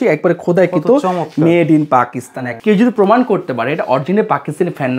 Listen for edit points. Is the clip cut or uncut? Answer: cut